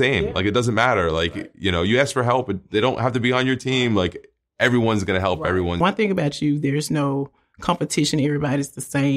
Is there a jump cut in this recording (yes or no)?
yes